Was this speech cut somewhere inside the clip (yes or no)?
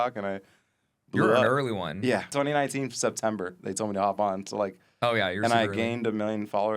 yes